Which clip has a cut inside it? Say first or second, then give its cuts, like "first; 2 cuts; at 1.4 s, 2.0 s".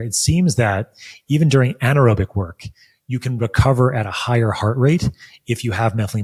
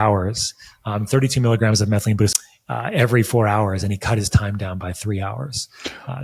second; 1 cut; at 2.3 s